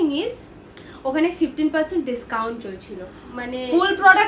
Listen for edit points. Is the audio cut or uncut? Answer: uncut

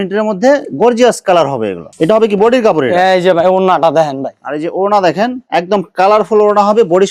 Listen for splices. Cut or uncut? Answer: uncut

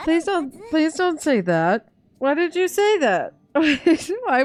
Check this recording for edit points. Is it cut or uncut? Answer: uncut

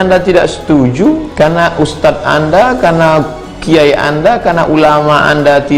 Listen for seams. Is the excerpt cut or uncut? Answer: cut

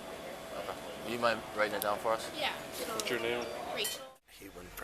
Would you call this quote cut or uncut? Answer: cut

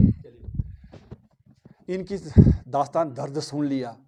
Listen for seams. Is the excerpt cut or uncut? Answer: uncut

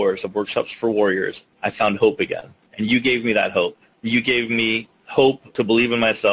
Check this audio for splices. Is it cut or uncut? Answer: cut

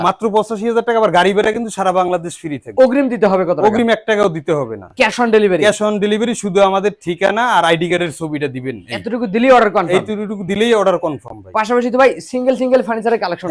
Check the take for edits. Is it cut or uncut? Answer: uncut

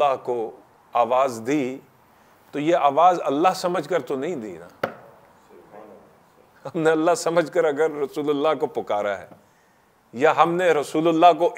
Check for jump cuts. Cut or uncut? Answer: uncut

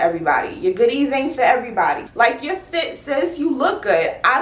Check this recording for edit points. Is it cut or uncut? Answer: cut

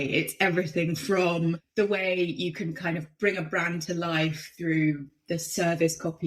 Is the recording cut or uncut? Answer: cut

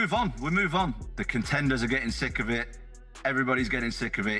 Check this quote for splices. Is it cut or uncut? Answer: cut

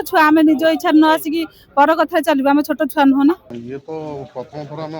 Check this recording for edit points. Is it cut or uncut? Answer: cut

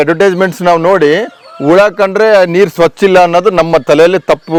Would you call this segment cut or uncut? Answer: uncut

